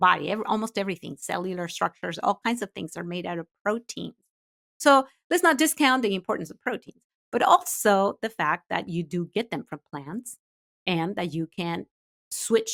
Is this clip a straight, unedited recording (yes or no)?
yes